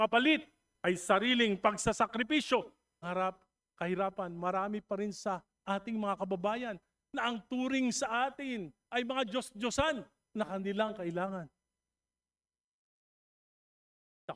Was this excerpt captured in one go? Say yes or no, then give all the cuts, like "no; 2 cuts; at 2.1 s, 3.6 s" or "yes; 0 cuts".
no; 1 cut; at 3.1 s